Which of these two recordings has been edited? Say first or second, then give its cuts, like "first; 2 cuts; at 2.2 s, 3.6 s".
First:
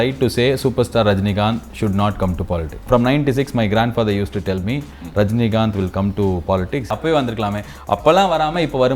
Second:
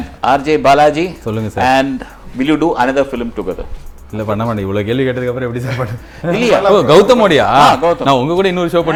first; 2 cuts; at 2.9 s, 6.9 s